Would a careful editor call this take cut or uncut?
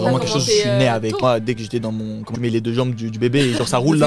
cut